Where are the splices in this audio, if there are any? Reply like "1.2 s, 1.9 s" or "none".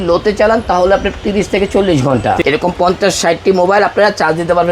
2.4 s